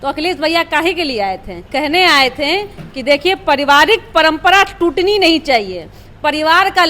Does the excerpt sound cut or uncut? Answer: cut